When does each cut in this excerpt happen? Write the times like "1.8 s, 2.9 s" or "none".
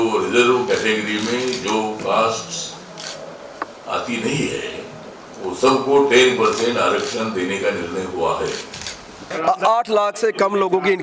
9.3 s